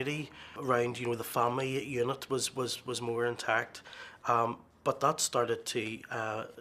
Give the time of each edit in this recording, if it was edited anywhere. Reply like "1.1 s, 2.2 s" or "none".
4.4 s